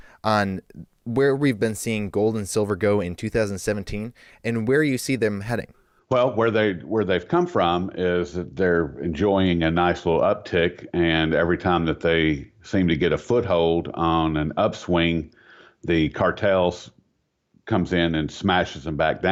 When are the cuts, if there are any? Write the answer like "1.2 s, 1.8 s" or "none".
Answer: none